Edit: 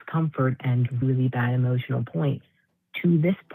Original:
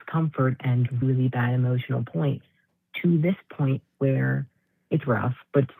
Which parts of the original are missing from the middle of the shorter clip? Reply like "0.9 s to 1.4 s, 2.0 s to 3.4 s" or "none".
none

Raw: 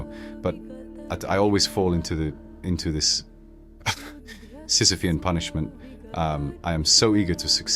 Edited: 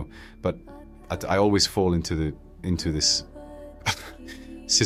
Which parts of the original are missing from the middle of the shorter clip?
none

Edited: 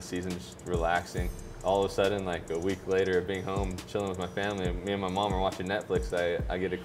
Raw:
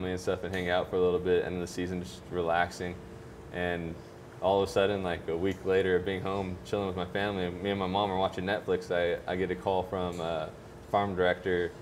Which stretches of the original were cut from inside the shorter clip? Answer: 3.1 s to 4.2 s

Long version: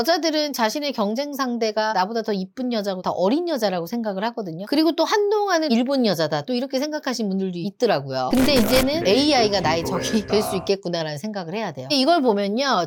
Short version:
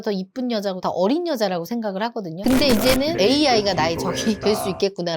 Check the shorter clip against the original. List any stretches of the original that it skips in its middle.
4.6 s to 8.3 s

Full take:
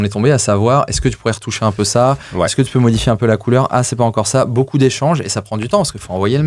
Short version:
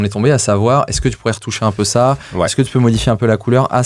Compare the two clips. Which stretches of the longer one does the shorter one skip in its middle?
none

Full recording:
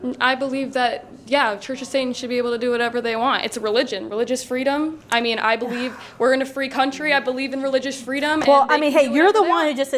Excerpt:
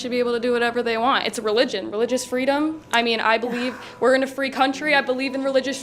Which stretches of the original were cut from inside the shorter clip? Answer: none

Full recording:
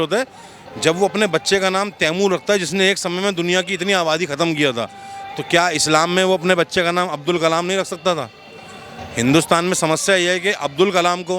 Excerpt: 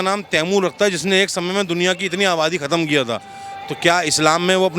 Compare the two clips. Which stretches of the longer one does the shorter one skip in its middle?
none

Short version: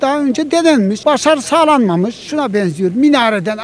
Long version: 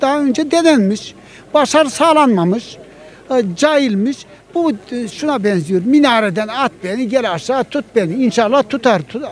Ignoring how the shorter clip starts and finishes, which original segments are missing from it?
1.0 s to 1.5 s, 2.7 s to 5.1 s

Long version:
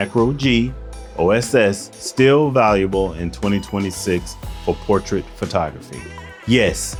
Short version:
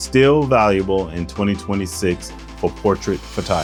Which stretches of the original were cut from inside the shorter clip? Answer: none

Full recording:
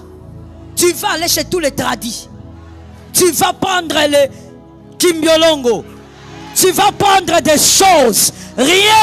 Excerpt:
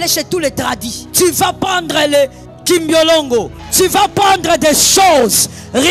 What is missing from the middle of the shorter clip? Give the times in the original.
2.2 s to 3.0 s, 4.5 s to 4.8 s, 5.9 s to 6.4 s

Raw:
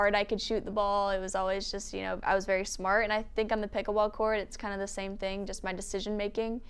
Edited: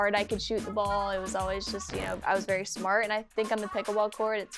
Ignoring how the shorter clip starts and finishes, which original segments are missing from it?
none

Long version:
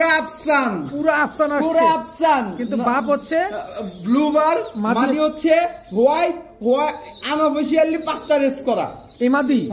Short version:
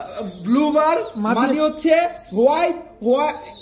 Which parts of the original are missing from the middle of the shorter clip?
none

